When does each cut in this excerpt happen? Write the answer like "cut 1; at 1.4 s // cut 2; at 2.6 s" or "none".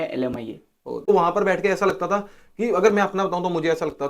cut 1; at 1.1 s